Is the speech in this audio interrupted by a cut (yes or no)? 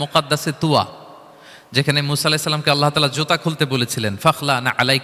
no